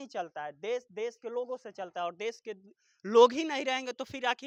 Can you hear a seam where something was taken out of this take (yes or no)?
no